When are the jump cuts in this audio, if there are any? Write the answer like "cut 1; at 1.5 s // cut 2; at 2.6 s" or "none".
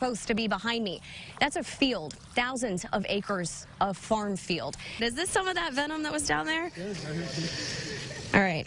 cut 1; at 4.9 s